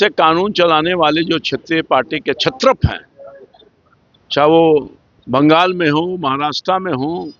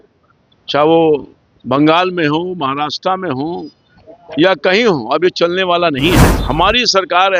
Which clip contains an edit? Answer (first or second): second